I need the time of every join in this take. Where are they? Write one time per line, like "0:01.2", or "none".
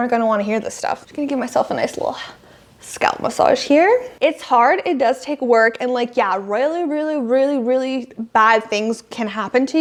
none